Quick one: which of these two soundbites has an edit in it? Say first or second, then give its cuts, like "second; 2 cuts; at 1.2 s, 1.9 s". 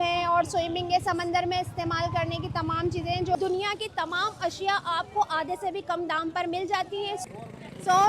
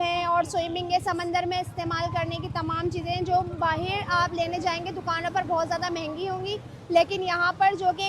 first; 2 cuts; at 3.3 s, 7.2 s